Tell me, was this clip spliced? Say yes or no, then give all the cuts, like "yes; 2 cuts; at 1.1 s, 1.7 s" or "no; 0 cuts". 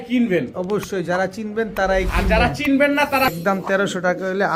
yes; 1 cut; at 3.3 s